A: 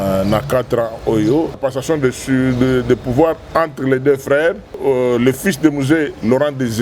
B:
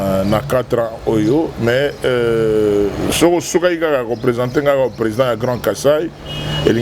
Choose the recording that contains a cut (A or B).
A